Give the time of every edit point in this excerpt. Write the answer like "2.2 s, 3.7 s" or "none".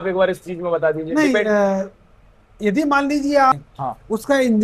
3.5 s